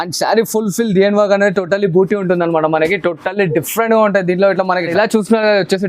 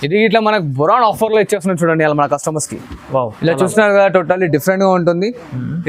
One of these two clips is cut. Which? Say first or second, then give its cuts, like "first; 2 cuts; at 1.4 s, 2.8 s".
first; 1 cut; at 4.9 s